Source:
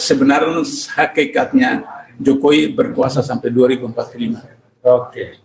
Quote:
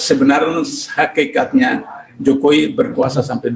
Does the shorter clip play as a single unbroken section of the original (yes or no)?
yes